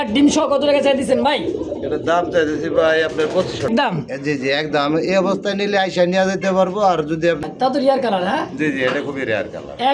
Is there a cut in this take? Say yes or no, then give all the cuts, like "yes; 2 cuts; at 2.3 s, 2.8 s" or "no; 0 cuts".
yes; 2 cuts; at 3.7 s, 7.4 s